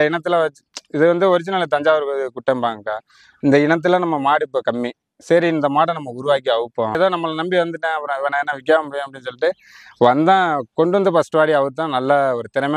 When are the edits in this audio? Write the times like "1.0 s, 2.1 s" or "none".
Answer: 7.0 s